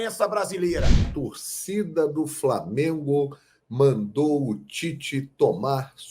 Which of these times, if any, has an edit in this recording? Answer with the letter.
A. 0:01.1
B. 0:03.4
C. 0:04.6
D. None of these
A